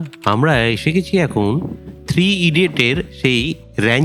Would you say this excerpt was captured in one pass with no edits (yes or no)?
yes